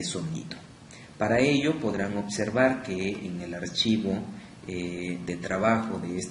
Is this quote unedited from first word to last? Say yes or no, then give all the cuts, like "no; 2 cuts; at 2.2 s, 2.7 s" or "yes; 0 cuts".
no; 1 cut; at 5.1 s